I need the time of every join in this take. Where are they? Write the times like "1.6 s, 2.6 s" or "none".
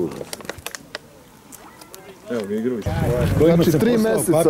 2.9 s